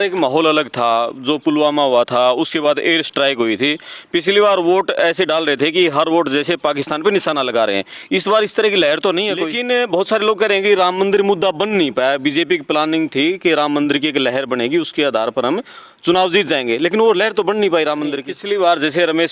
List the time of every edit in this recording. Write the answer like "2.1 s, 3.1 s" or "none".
9.5 s, 18.3 s